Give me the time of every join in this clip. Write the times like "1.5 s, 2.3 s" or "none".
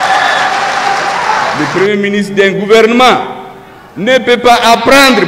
1.5 s